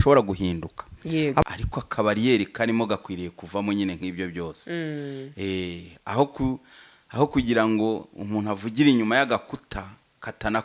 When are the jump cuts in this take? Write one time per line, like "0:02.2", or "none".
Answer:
0:01.4